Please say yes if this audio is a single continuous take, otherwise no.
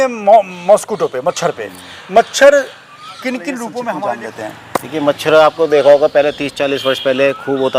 no